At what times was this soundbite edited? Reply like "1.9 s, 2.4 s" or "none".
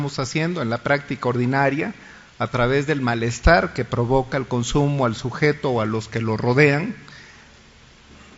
2.1 s